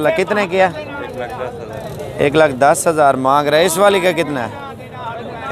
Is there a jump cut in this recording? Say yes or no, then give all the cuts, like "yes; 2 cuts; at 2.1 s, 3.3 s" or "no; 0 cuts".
no; 0 cuts